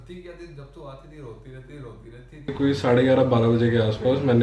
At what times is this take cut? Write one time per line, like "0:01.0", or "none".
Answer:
0:02.5